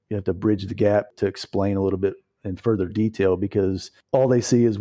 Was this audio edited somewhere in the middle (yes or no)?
yes